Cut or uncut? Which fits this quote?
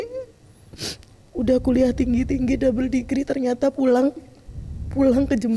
uncut